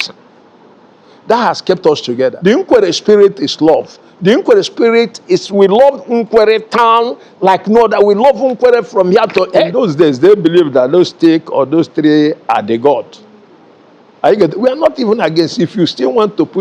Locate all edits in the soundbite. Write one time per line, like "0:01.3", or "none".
0:02.4
0:09.7